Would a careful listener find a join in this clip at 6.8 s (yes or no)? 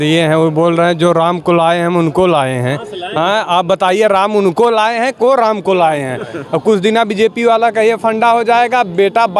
no